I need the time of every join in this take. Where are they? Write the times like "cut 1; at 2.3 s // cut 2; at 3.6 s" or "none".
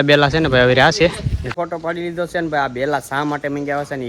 cut 1; at 1.4 s

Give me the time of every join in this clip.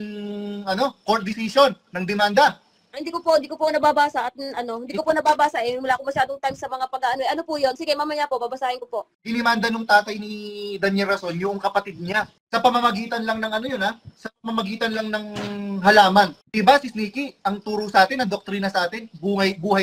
cut 1; at 9.2 s // cut 2; at 12.4 s // cut 3; at 16.4 s

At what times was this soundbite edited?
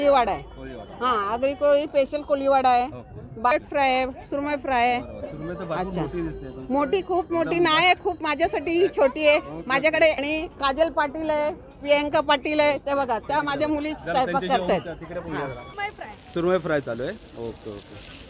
cut 1; at 3.5 s // cut 2; at 10.2 s // cut 3; at 15.7 s

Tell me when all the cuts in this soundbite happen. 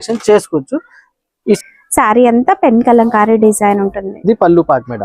cut 1; at 1.6 s

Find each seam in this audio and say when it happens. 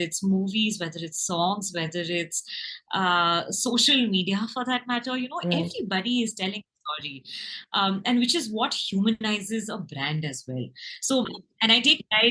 cut 1; at 11.3 s

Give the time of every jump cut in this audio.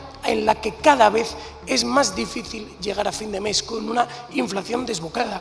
none

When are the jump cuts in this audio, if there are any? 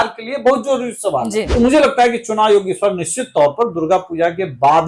cut 1; at 1.5 s

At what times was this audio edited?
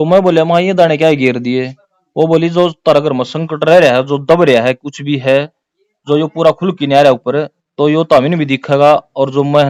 none

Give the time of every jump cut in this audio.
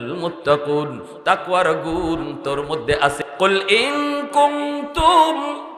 cut 1; at 3.2 s

